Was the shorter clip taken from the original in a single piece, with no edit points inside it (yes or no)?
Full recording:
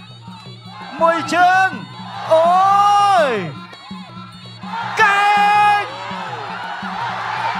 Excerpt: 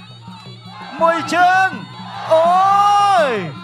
yes